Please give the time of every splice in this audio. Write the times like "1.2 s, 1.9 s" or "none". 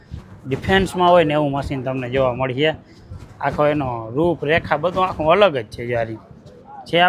none